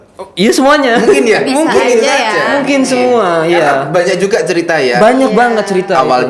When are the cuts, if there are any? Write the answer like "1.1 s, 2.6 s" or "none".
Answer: none